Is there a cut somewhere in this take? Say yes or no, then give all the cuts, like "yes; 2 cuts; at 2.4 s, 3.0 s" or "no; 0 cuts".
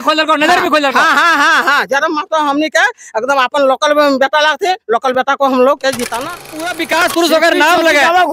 yes; 1 cut; at 6.8 s